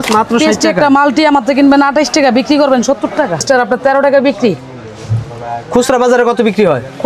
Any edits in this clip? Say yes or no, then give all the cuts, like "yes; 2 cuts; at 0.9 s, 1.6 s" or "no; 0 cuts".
yes; 1 cut; at 3.4 s